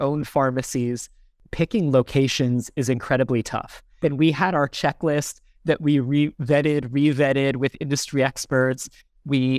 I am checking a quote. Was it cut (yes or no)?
yes